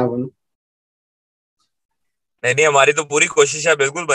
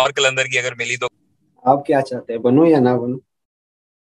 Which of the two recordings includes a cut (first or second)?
second